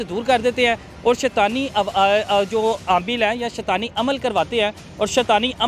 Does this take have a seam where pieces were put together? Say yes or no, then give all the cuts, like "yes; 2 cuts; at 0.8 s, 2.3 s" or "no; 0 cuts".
no; 0 cuts